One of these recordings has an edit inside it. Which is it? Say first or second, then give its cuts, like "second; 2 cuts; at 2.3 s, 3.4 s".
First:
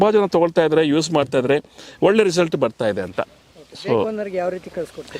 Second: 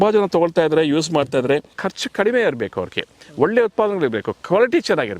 second; 1 cut; at 1.7 s